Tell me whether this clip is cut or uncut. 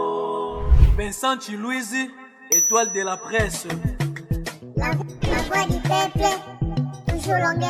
uncut